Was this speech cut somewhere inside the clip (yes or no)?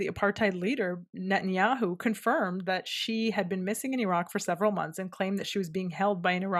no